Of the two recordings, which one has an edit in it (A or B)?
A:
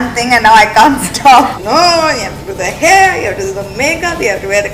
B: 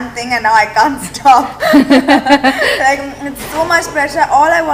A